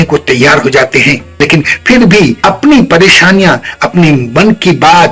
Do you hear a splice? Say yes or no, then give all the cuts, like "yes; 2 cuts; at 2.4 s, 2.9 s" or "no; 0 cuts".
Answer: no; 0 cuts